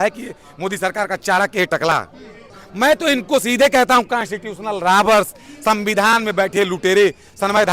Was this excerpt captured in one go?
no; 1 cut; at 2.6 s

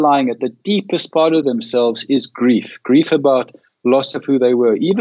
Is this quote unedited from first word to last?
yes; 0 cuts

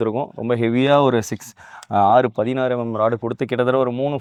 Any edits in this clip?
no; 0 cuts

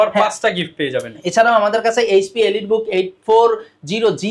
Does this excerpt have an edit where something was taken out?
no; 0 cuts

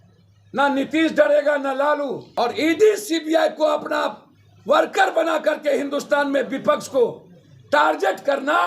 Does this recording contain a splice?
yes; 1 cut; at 2.2 s

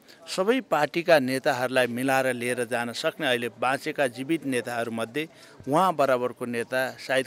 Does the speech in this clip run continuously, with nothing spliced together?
yes; 0 cuts

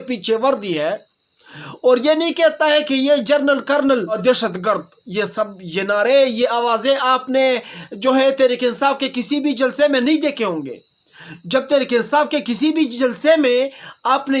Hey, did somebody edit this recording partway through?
yes; 1 cut; at 4.2 s

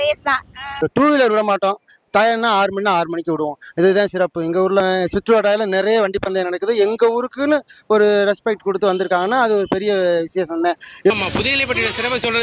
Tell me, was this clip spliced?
yes; 3 cuts; at 0.9 s, 4.8 s, 11.1 s

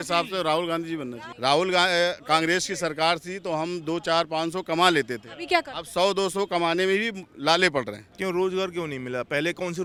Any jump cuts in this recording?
no; 0 cuts

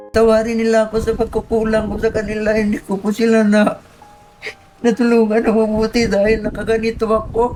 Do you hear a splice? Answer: no; 0 cuts

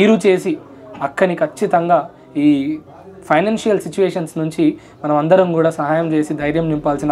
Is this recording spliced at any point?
no; 0 cuts

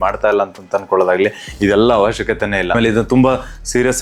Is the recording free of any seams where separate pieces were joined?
yes; 0 cuts

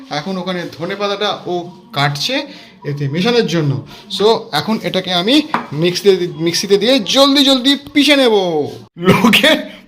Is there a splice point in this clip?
yes; 1 cut; at 8.8 s

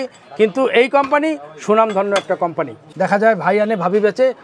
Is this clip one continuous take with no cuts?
no; 1 cut; at 2.8 s

